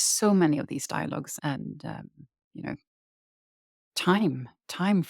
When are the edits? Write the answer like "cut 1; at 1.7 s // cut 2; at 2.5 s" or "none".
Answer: cut 1; at 1.3 s